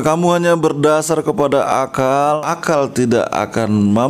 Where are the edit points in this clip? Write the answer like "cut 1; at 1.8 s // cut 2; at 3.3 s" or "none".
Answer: cut 1; at 2.4 s